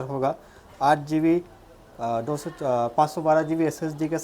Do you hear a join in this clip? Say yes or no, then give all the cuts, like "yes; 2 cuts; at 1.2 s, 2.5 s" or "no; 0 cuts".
no; 0 cuts